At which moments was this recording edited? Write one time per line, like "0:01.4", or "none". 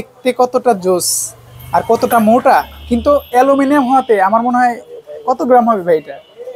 none